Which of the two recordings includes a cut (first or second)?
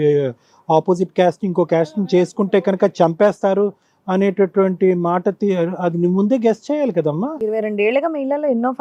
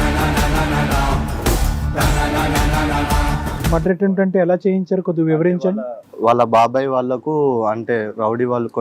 second